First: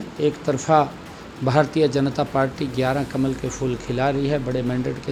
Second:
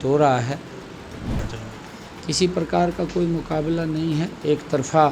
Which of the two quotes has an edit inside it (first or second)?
second